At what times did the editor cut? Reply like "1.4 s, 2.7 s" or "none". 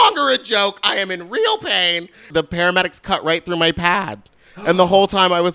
2.3 s